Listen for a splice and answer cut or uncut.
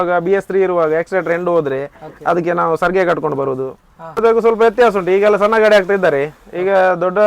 cut